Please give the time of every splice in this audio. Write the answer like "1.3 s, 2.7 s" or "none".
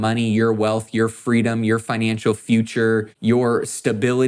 3.1 s